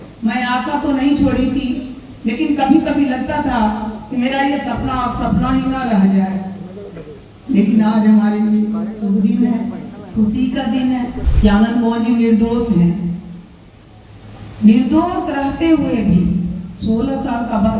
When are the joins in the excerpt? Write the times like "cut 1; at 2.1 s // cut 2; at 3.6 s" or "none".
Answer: cut 1; at 11.2 s